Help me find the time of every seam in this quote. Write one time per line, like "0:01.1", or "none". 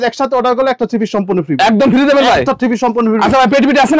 none